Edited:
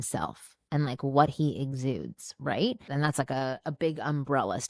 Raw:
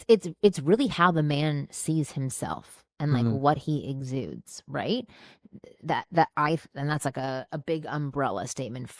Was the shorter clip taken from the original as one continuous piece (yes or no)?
no